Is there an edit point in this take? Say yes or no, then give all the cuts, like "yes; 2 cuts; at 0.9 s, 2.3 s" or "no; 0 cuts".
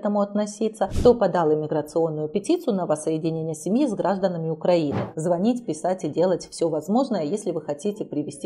yes; 2 cuts; at 0.9 s, 5.1 s